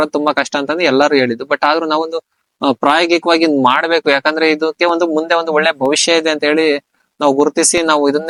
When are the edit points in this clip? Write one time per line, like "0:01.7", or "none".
none